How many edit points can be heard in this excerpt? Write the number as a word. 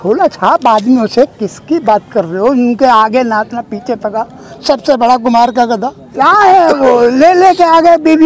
one